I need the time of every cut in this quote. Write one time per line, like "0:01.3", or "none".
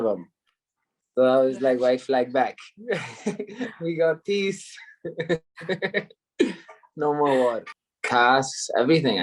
0:07.7